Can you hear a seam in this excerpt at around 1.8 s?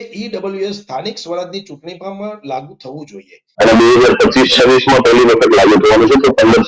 no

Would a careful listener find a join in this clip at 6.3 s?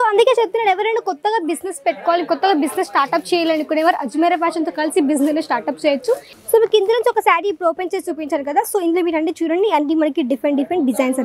yes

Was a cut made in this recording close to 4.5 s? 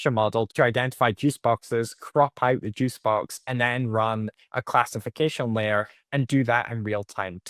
no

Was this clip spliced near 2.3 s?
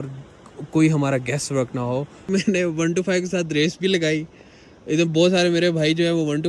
yes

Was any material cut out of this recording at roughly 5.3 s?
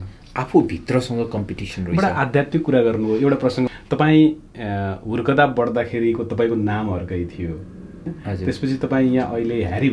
no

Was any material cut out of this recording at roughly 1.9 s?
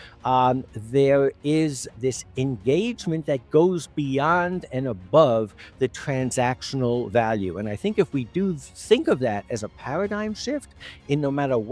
yes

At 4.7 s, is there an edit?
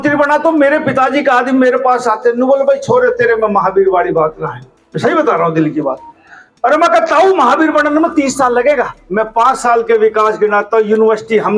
no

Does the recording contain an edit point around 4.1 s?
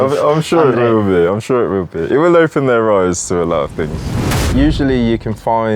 yes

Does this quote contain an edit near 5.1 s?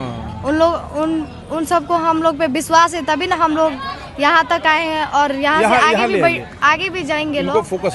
no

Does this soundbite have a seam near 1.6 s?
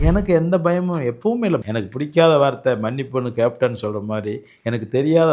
yes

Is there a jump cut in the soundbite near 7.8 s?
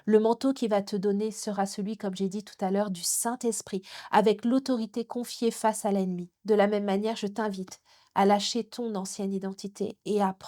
no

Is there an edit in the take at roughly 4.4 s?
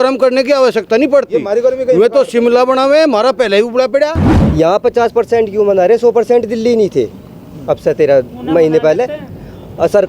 yes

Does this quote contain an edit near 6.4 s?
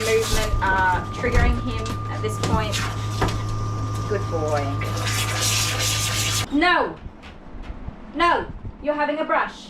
yes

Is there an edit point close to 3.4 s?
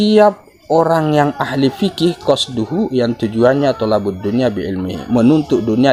no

